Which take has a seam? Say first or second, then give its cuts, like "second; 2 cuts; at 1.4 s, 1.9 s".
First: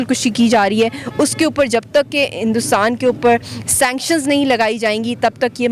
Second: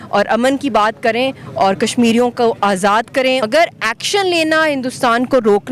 second; 1 cut; at 3.4 s